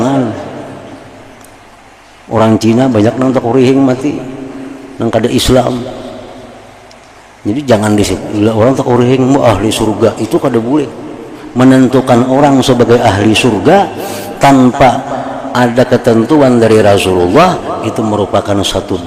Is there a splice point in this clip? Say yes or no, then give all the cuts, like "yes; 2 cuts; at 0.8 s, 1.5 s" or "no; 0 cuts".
no; 0 cuts